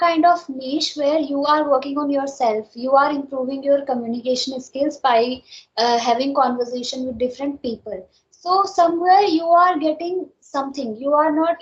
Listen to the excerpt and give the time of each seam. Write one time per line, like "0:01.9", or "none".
none